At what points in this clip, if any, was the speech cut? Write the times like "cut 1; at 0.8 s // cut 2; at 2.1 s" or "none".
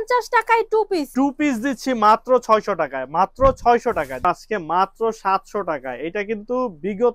cut 1; at 1.1 s // cut 2; at 4.2 s

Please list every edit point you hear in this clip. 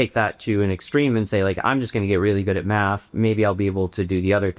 none

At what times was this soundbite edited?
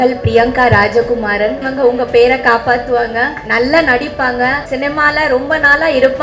cut 1; at 1.7 s // cut 2; at 3.4 s // cut 3; at 4.6 s

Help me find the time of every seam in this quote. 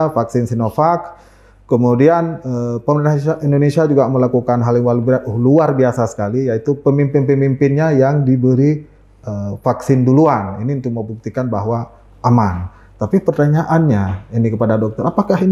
none

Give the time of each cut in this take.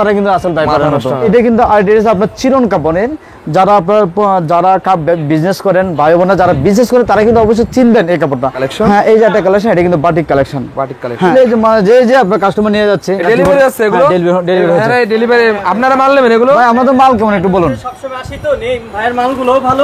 cut 1; at 1.2 s // cut 2; at 8.6 s // cut 3; at 11.3 s

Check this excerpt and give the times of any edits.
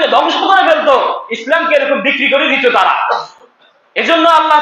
none

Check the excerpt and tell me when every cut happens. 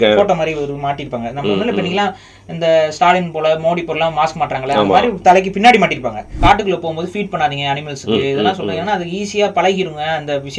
cut 1; at 6.2 s

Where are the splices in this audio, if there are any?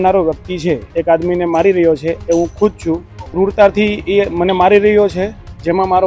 cut 1; at 0.9 s // cut 2; at 3.2 s

